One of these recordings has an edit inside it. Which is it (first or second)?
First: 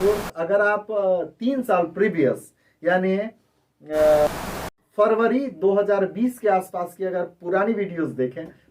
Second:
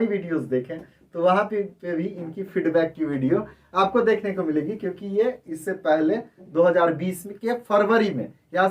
first